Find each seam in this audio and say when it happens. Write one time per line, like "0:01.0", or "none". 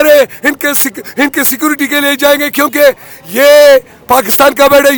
none

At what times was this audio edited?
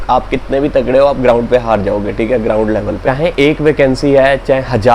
0:03.0

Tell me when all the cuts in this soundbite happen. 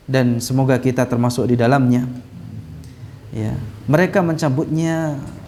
none

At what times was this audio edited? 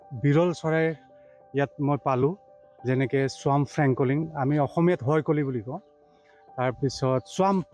none

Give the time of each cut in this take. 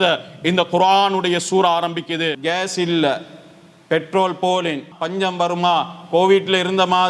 0:02.3
0:04.9

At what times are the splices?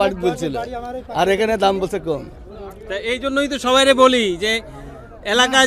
none

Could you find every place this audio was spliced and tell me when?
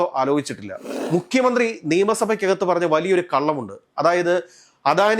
0:00.9

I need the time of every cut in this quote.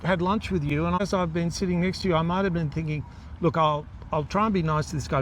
0:01.0

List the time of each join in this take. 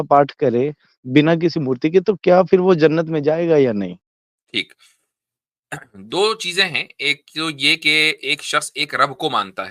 none

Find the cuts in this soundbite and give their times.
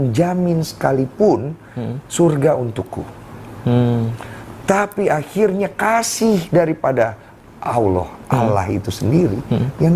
none

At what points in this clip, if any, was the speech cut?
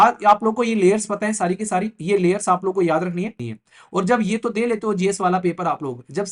0:03.5

